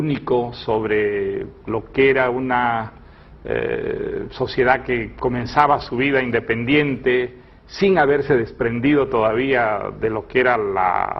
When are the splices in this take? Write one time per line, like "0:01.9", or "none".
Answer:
none